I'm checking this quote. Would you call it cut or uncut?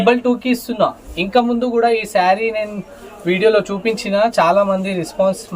uncut